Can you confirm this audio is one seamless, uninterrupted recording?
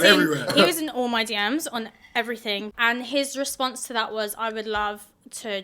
no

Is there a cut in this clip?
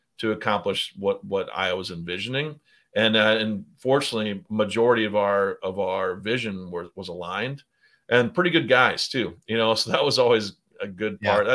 no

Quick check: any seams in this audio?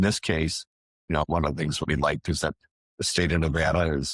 yes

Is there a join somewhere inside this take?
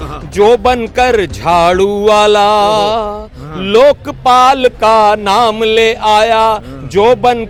no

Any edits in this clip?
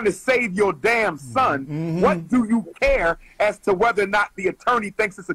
no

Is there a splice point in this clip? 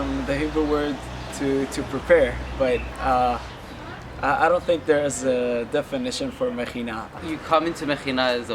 yes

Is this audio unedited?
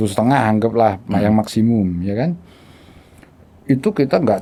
yes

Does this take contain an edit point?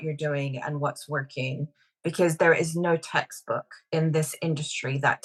no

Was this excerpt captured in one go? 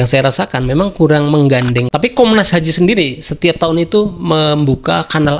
no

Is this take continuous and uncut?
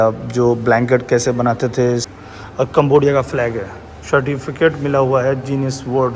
no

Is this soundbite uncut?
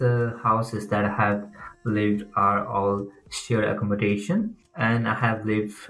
yes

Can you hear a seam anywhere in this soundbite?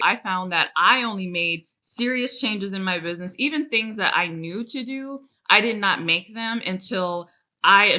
no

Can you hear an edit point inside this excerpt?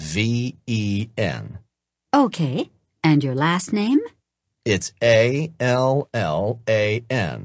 no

